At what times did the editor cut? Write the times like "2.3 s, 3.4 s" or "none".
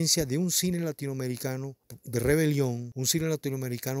none